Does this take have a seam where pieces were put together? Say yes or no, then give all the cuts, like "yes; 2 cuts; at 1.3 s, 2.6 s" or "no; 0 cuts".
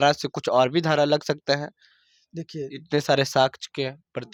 no; 0 cuts